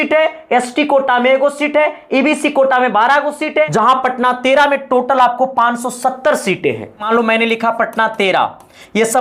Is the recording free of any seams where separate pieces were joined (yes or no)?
no